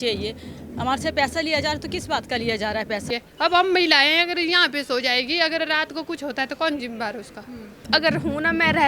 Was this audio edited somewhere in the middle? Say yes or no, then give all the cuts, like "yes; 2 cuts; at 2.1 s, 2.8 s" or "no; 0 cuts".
yes; 2 cuts; at 3.0 s, 7.8 s